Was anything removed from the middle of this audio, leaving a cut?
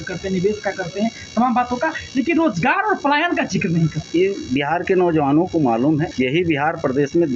yes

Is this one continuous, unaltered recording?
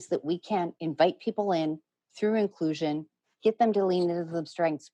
yes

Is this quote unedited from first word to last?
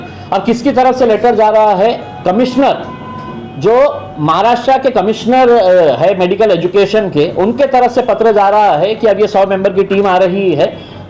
yes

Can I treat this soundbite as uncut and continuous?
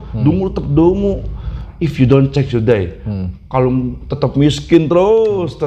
no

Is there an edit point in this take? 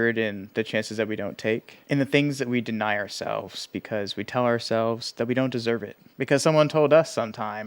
yes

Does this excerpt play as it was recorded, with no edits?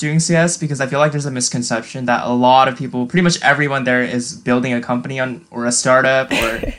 yes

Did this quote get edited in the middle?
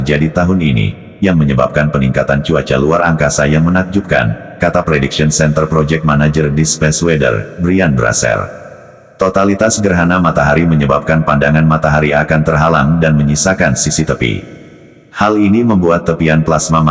no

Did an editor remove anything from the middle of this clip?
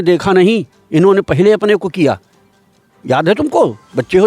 no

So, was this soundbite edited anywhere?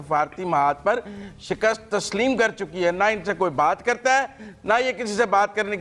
no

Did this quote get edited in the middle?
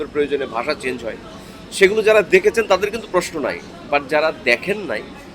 no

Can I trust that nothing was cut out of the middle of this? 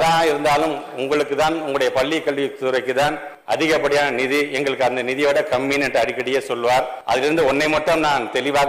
no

